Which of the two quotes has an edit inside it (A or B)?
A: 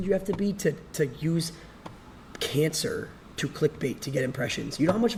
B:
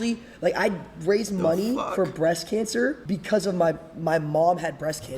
B